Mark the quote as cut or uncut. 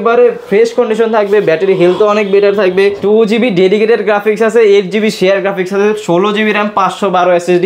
cut